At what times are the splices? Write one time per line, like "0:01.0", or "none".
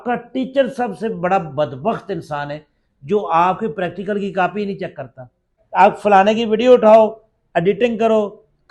0:05.5